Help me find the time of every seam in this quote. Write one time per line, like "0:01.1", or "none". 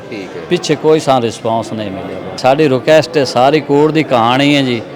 0:02.4